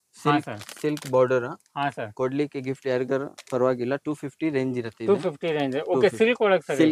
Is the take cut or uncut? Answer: uncut